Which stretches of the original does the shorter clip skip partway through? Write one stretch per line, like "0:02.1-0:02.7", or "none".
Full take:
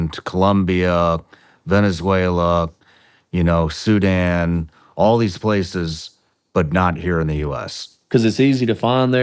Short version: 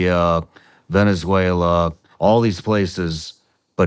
0:02.8-0:04.8

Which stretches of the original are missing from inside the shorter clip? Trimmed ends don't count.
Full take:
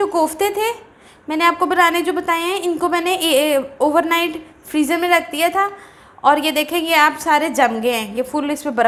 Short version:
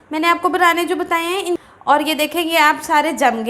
0:02.8-0:06.0

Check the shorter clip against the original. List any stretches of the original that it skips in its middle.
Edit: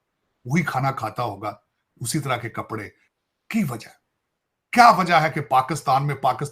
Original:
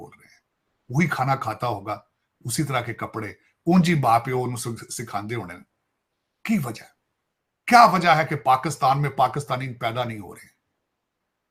0:03.4-0:05.9

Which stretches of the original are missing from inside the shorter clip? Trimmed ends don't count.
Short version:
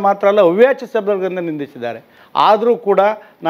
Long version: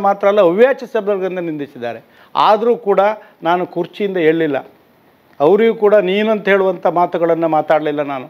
none

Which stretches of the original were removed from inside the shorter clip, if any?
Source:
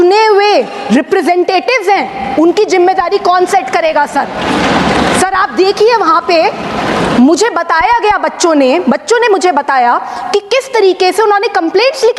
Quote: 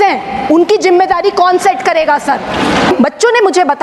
0:04.8-0:08.8

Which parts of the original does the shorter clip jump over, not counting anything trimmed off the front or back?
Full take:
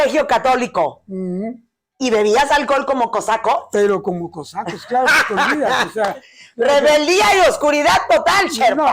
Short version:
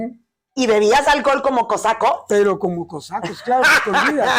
none

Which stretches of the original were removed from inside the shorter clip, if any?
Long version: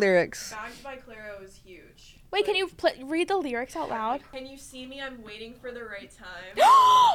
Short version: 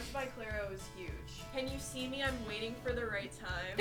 0:02.2-0:04.3

